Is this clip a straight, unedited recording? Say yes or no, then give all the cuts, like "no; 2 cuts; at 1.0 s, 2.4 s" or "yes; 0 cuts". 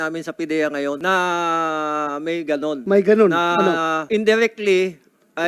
no; 3 cuts; at 1.0 s, 2.8 s, 4.0 s